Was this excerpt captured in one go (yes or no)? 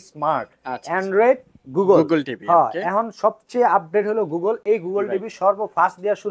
yes